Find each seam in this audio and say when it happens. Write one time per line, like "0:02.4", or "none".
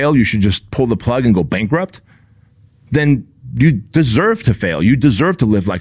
none